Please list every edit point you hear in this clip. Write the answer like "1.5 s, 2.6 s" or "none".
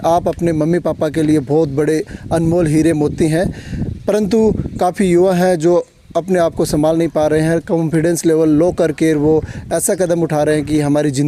none